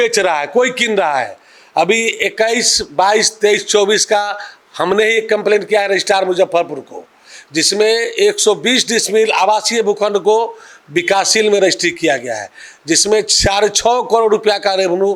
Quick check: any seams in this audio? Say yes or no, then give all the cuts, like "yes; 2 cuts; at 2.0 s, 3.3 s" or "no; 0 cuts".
no; 0 cuts